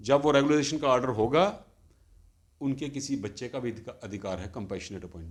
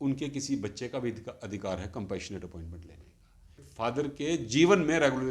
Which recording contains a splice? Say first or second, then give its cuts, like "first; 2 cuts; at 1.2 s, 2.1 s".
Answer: second; 1 cut; at 3.6 s